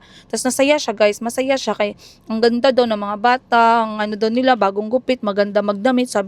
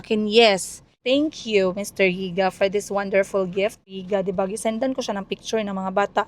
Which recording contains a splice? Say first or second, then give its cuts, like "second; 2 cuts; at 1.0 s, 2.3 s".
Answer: second; 2 cuts; at 1.0 s, 4.0 s